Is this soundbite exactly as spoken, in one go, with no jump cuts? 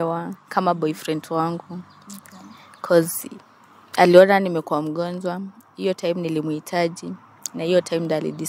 yes; 0 cuts

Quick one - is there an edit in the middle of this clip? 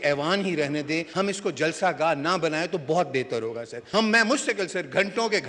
yes; 2 cuts; at 1.1 s, 3.7 s

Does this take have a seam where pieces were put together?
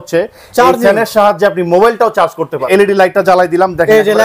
yes; 1 cut; at 2.6 s

